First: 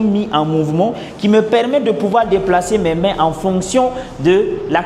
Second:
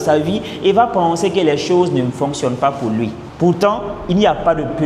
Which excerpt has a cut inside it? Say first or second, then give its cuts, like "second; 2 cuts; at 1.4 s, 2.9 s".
second; 1 cut; at 3.2 s